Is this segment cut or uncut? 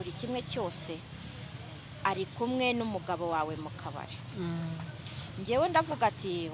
uncut